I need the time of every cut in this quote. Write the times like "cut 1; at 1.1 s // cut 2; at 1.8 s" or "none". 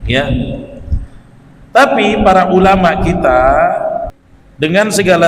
cut 1; at 4.1 s